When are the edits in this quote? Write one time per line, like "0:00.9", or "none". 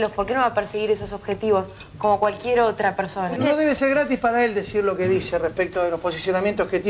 0:03.3